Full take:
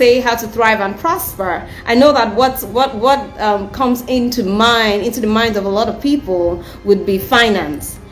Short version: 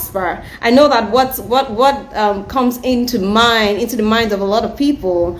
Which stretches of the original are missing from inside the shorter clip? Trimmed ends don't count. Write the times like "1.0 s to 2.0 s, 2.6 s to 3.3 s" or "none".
none